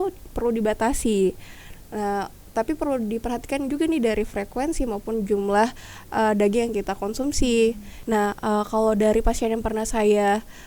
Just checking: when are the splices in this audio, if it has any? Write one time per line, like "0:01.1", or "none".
0:07.9